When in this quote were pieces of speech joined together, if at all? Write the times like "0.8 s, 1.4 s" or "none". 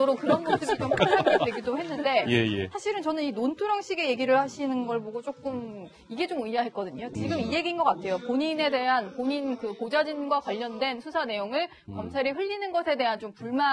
8.2 s